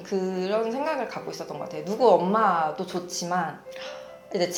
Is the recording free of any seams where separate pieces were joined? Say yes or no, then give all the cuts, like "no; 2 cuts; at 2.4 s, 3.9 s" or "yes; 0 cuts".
yes; 0 cuts